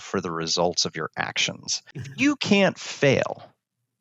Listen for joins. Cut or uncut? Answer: cut